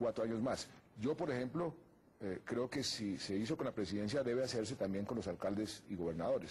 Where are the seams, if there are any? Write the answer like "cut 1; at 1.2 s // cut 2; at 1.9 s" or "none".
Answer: none